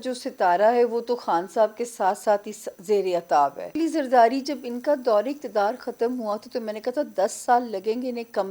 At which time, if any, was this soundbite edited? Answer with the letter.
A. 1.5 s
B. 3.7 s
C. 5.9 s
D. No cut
B